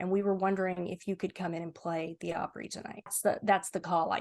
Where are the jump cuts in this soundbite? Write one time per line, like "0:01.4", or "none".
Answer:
0:03.1